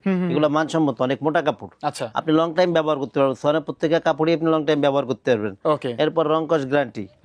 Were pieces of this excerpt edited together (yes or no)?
no